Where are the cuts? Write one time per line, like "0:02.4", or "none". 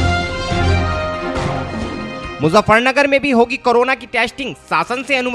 0:01.7